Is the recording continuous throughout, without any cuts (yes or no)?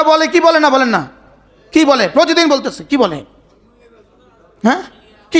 yes